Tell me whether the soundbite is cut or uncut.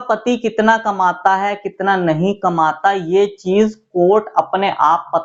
uncut